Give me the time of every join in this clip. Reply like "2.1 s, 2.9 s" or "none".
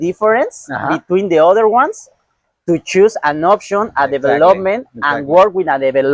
none